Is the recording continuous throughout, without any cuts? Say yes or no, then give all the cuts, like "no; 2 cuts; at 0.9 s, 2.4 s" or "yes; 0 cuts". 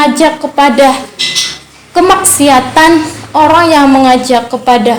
yes; 0 cuts